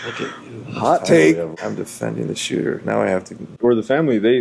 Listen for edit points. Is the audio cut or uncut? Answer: uncut